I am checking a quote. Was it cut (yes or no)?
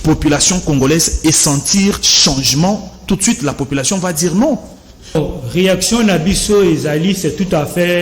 yes